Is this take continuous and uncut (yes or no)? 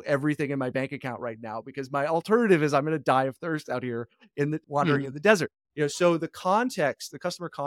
yes